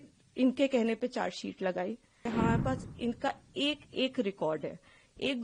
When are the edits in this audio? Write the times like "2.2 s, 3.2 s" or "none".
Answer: 2.2 s